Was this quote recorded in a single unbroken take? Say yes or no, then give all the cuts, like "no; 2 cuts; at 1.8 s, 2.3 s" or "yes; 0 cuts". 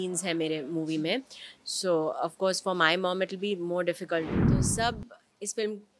no; 1 cut; at 4.3 s